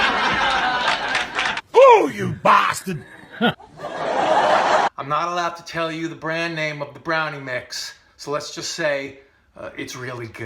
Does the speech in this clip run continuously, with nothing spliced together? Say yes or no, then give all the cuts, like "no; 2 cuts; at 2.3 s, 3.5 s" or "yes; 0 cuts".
no; 1 cut; at 4.9 s